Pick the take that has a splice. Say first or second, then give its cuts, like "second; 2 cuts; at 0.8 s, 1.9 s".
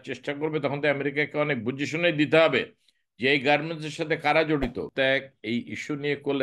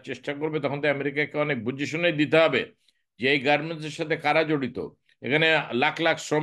first; 1 cut; at 4.9 s